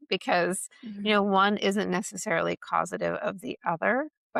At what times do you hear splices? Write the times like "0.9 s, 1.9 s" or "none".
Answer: none